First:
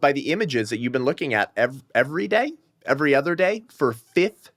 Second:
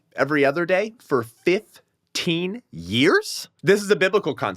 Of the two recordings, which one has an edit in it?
second; 1 cut; at 3.4 s

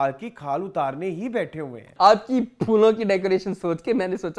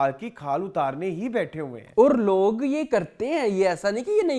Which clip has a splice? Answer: first; 1 cut; at 1.8 s

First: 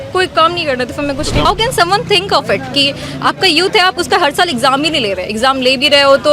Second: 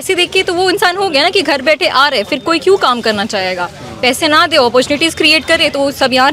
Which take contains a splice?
first; 1 cut; at 1.5 s

